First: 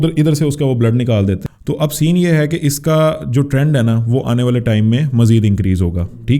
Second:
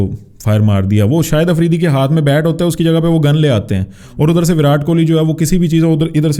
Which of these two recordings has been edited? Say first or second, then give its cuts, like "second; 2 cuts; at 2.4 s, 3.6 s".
first; 1 cut; at 1.4 s